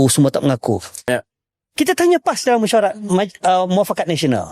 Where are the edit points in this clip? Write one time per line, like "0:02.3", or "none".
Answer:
0:01.0